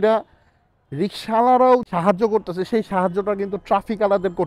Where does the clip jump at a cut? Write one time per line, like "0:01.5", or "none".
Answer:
0:01.9